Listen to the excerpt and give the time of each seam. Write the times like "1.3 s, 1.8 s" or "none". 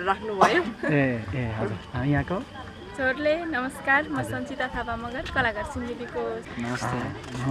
6.5 s